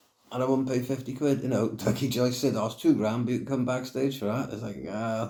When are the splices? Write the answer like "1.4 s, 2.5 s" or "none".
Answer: none